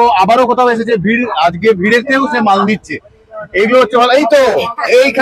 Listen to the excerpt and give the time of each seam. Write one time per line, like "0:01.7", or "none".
none